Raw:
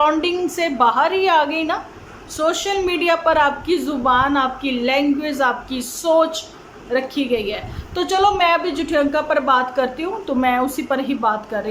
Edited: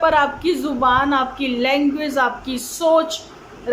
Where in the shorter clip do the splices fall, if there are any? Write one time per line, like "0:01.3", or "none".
none